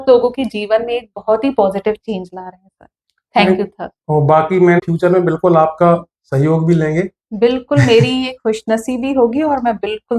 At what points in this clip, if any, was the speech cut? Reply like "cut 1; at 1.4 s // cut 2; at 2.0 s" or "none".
cut 1; at 4.8 s